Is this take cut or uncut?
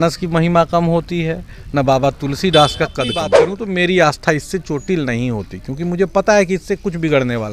cut